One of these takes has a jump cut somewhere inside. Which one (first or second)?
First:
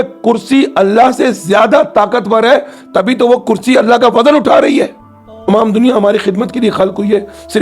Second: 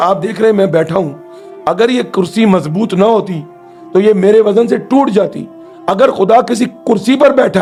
first